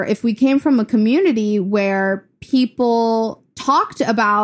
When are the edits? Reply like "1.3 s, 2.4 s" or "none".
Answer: 3.5 s